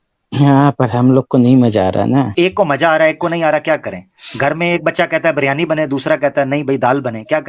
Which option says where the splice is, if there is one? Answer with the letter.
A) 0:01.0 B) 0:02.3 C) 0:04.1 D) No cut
B